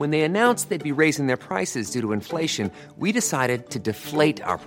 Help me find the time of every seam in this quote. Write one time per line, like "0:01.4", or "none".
none